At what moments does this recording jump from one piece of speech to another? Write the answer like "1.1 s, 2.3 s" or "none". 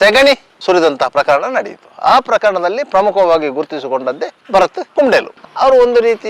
5.3 s

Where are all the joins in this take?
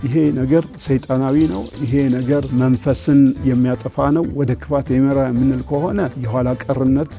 2.5 s, 6.2 s

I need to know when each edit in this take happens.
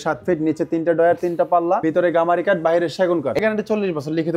1.8 s, 3.4 s

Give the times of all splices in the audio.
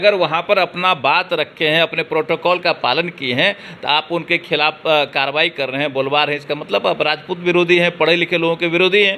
none

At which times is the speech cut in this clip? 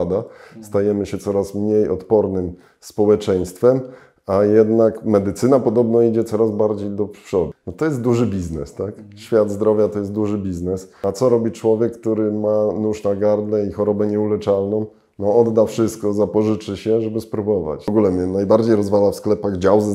7.6 s, 10.9 s, 17.9 s

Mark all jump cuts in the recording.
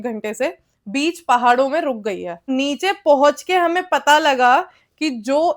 2.5 s

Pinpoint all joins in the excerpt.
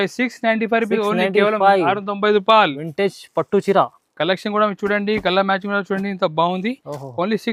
none

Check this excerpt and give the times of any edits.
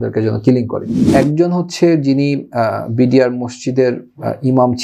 1.0 s

